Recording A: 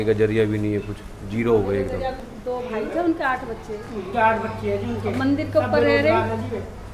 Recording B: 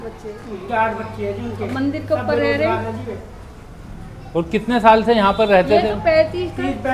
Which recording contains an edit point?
A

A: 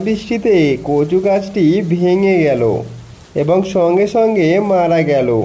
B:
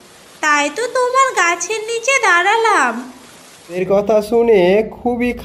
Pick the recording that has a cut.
B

